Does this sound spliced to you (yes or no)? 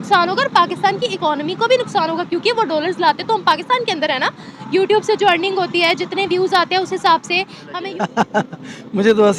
yes